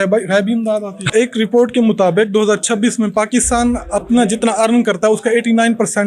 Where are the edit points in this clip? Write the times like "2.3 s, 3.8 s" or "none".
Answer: 1.1 s